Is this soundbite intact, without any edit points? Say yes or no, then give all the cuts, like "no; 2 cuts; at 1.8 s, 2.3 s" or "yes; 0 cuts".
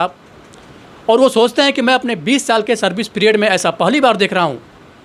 yes; 0 cuts